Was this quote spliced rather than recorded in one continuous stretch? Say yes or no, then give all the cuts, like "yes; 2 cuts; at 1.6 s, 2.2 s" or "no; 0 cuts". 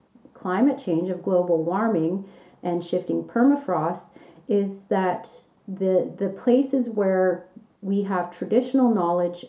no; 0 cuts